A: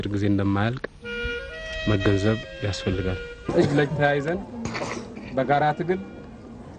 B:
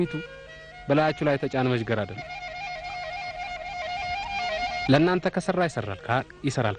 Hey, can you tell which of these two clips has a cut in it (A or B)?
A